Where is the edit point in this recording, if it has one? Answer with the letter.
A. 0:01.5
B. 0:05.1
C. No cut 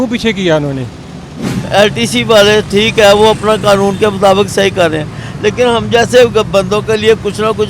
A